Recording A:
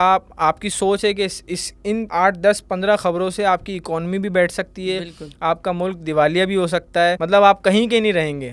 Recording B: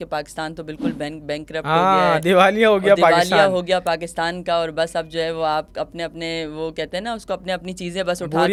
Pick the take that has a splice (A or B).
A